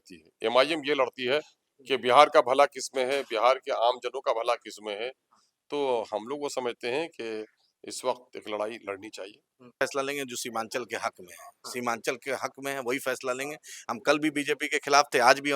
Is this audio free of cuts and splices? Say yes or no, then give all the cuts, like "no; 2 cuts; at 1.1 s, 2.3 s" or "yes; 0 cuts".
no; 1 cut; at 9.8 s